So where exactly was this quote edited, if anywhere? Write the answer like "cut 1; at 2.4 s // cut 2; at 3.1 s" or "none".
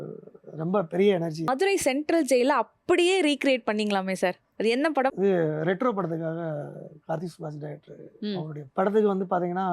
cut 1; at 1.5 s // cut 2; at 5.1 s